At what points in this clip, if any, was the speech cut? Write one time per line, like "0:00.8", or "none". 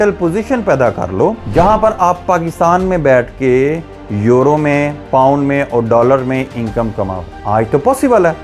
none